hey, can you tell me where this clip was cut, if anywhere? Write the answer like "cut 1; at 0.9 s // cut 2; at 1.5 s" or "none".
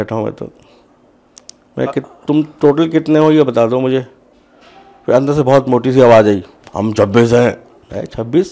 none